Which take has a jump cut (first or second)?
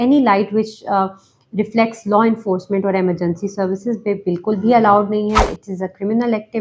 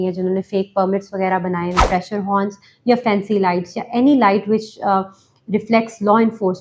second